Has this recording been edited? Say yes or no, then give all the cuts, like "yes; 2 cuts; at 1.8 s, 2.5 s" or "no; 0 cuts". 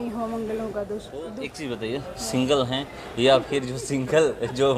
yes; 1 cut; at 1.5 s